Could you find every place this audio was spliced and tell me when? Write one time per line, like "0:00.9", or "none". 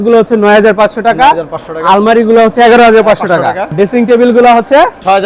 0:03.7